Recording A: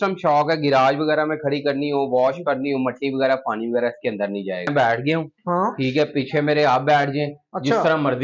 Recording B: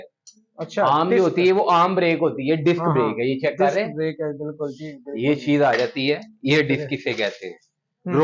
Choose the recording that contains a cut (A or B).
A